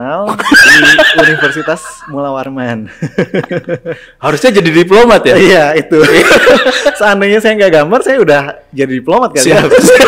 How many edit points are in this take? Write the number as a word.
zero